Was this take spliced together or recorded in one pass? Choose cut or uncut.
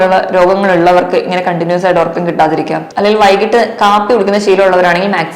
cut